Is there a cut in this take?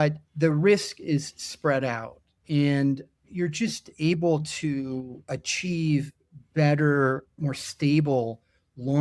yes; 3 cuts; at 3.2 s, 5.2 s, 7.4 s

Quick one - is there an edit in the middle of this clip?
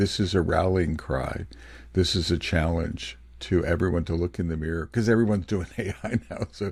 no; 0 cuts

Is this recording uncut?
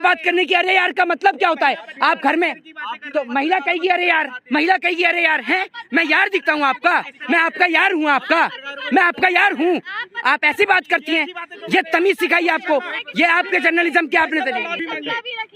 yes; 0 cuts

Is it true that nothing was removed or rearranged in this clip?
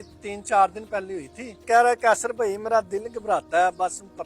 no; 1 cut; at 1.6 s

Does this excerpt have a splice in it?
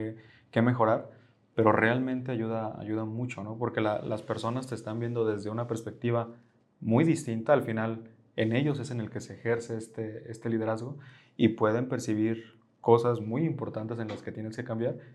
no; 0 cuts

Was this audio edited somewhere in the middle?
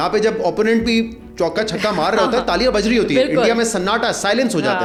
no; 0 cuts

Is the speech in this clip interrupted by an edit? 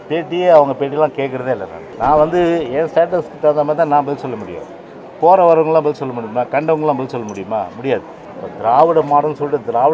yes; 2 cuts; at 1.8 s, 8.2 s

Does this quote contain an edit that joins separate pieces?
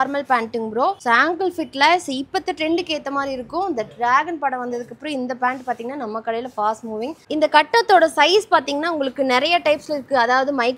yes; 2 cuts; at 1.0 s, 7.2 s

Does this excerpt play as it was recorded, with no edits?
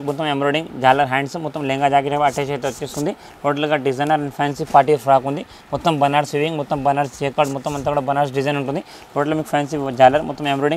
yes; 0 cuts

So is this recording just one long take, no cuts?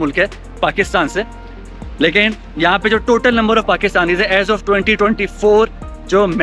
yes; 0 cuts

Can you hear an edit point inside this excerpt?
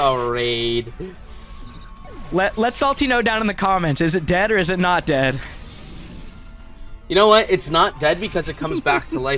no; 0 cuts

